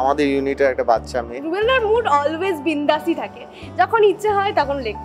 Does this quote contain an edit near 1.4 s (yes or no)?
yes